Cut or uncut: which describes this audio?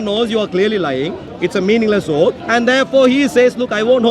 cut